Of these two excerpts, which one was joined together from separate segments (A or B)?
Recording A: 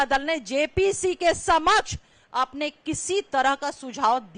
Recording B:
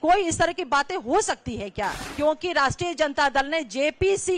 B